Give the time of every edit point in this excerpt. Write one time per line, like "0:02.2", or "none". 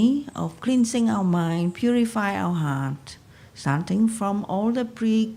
none